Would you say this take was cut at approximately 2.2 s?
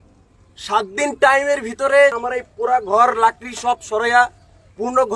yes; 1 cut; at 2.2 s

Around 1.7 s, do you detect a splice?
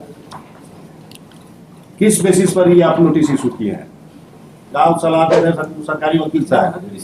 no; 1 cut; at 4.7 s

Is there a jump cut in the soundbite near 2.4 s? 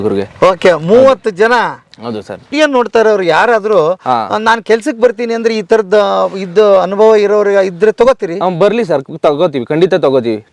yes; 1 cut; at 2.4 s

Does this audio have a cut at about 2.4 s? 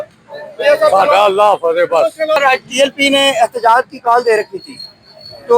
yes; 1 cut; at 2.4 s

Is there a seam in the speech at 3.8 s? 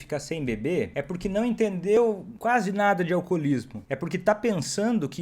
yes; 3 cuts; at 0.9 s, 2.0 s, 3.8 s

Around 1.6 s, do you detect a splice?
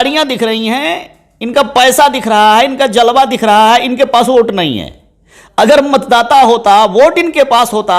no; 0 cuts

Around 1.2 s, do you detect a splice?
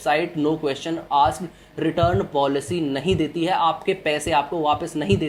no; 0 cuts

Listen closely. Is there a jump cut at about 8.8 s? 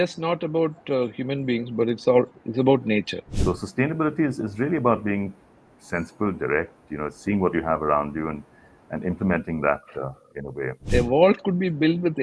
no; 2 cuts; at 3.2 s, 10.9 s

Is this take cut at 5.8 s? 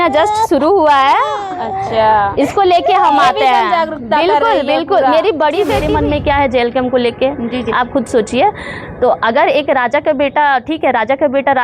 yes; 1 cut; at 5.8 s

